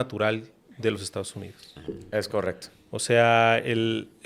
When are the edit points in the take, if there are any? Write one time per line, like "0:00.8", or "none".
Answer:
none